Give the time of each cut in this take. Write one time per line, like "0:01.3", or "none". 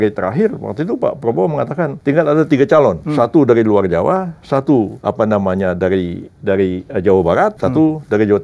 0:02.0
0:03.0
0:04.9
0:07.6